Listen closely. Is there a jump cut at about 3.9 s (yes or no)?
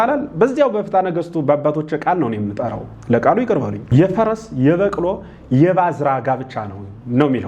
yes